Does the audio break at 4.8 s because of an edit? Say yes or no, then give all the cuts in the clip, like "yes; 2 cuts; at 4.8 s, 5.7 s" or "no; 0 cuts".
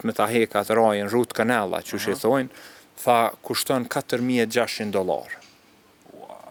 no; 0 cuts